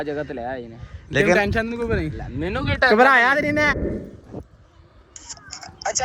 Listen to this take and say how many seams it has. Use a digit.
1